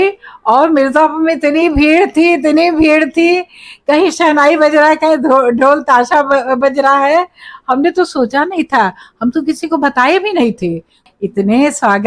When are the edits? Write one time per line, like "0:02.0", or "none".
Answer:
0:11.0

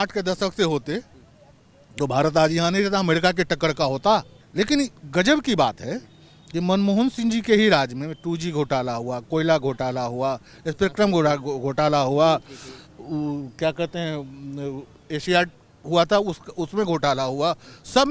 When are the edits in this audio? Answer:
0:04.4

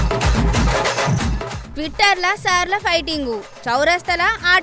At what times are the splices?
0:01.5

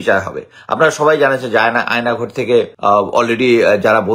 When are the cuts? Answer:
0:02.7

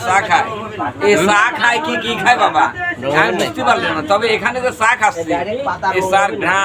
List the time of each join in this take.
none

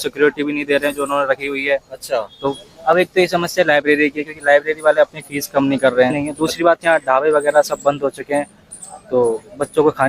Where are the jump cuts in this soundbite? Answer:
0:02.7
0:06.2

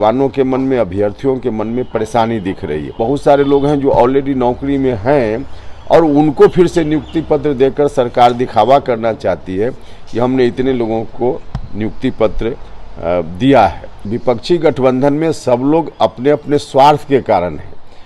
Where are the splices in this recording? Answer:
0:03.0
0:14.1

